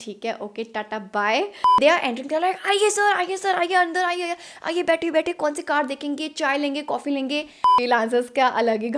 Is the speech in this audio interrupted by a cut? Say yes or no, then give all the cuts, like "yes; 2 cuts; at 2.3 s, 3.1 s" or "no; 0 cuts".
yes; 2 cuts; at 1.6 s, 7.7 s